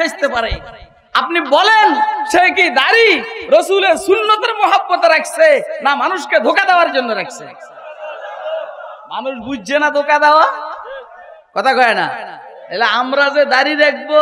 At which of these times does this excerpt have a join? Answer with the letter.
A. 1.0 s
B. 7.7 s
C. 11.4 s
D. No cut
D